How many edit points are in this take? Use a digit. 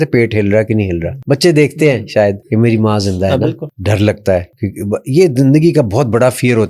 4